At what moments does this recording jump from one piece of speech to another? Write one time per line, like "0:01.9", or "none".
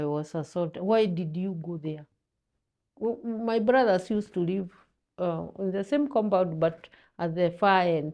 none